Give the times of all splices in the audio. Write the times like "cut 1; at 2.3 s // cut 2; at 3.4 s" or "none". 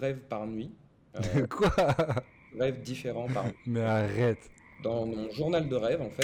none